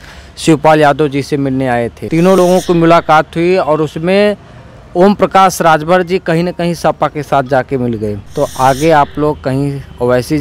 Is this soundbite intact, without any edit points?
no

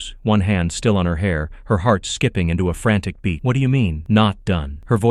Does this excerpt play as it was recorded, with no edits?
yes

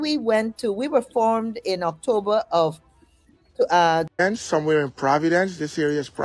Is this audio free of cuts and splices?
no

